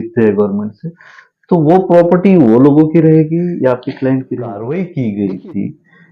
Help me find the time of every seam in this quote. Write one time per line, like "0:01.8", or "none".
0:04.6